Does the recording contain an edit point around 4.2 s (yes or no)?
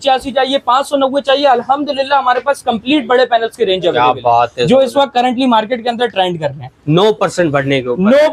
no